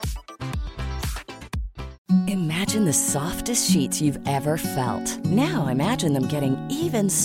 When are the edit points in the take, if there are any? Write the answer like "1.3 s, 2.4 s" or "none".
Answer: 2.0 s